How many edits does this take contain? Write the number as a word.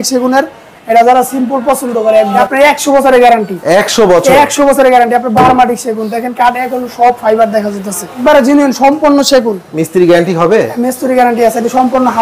two